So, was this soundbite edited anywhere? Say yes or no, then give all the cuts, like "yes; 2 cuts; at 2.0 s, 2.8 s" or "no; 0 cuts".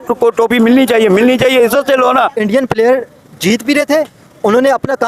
yes; 1 cut; at 2.3 s